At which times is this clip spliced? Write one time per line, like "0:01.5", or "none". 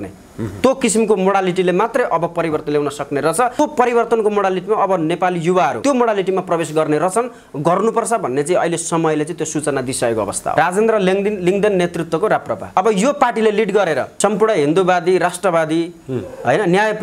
0:03.6
0:05.8
0:10.5
0:12.7
0:14.1